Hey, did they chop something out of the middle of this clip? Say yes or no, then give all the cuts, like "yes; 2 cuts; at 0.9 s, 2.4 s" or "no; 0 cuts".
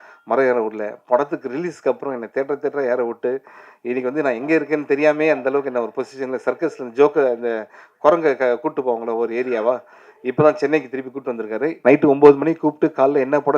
yes; 1 cut; at 11.8 s